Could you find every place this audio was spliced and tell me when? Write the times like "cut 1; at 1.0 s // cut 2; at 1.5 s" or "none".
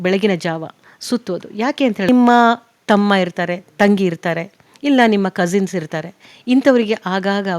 cut 1; at 2.1 s